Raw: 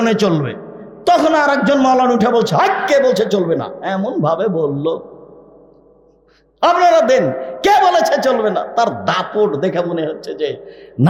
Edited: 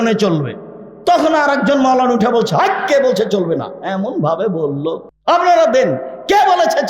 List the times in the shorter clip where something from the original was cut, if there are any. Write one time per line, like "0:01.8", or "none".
0:05.1